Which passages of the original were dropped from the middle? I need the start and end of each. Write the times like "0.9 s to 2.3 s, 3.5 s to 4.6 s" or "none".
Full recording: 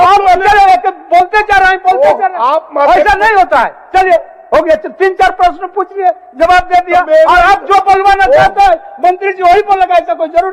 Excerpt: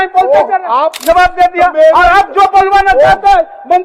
2.7 s to 6.3 s